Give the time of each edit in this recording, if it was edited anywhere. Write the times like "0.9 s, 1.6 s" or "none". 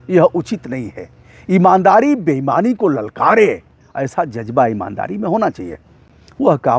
none